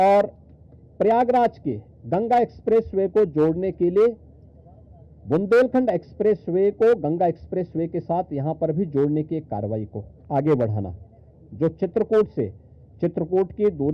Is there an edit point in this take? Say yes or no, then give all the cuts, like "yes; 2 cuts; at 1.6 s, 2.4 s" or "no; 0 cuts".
no; 0 cuts